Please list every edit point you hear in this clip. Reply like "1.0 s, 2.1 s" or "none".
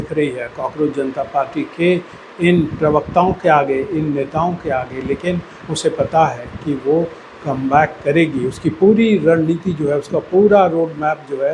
none